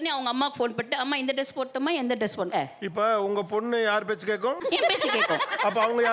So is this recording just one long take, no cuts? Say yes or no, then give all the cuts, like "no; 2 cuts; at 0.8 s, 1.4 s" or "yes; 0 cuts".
no; 2 cuts; at 2.5 s, 4.6 s